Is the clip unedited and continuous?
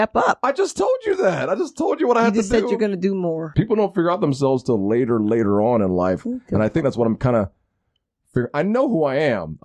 no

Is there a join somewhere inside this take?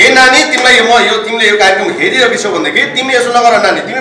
no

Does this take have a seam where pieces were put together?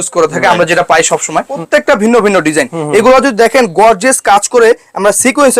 yes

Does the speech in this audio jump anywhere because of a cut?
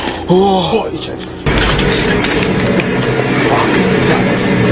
no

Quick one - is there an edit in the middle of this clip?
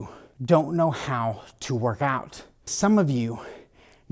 no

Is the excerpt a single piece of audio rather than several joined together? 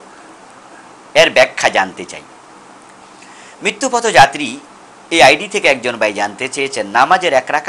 no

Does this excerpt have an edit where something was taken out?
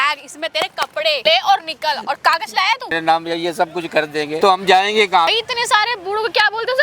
yes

